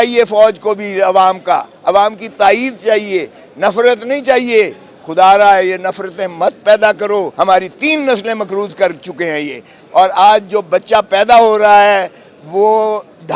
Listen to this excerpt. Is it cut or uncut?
cut